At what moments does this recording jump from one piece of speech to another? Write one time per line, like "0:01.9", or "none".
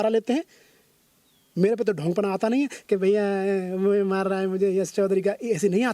0:01.4